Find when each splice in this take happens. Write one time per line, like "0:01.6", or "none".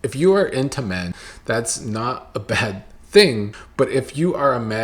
0:01.2
0:03.6